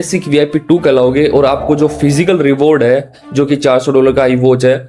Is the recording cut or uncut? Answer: uncut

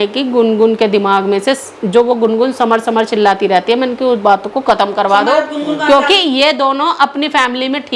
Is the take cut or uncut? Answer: uncut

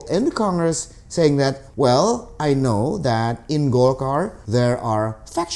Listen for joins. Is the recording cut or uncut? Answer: cut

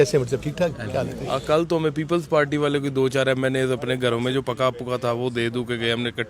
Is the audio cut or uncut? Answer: cut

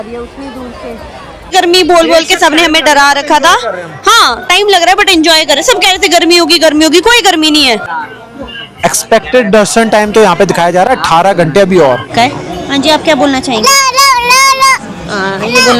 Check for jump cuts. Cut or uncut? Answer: cut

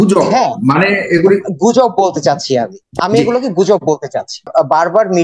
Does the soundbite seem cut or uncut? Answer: cut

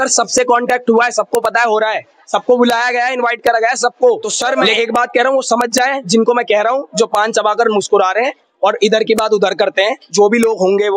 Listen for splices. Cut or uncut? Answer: cut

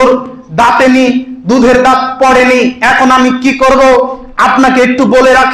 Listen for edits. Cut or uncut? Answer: uncut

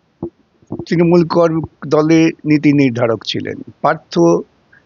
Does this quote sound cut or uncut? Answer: uncut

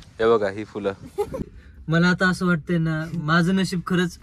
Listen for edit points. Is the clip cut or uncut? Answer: cut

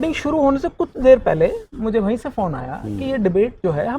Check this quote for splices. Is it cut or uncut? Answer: uncut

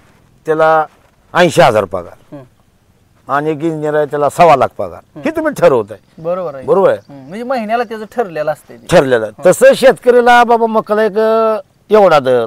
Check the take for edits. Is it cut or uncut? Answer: uncut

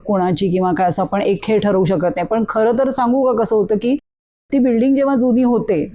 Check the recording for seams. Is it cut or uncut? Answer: uncut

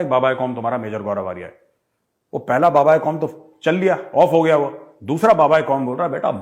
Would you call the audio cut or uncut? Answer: uncut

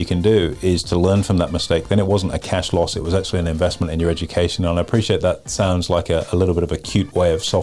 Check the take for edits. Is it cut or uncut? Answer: uncut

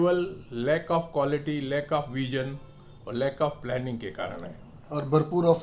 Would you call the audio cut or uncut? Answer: uncut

